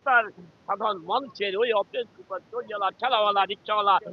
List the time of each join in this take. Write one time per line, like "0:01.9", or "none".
none